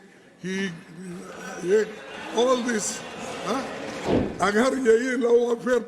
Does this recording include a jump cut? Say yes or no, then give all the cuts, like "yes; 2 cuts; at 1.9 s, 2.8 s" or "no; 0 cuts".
yes; 1 cut; at 4.1 s